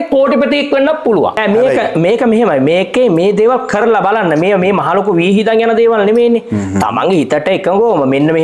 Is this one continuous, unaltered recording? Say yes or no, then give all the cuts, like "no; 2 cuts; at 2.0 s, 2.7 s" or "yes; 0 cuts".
no; 1 cut; at 1.4 s